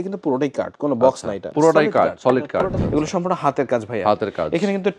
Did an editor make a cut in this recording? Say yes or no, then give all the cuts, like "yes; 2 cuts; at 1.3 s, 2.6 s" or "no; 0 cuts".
yes; 2 cuts; at 1.5 s, 2.8 s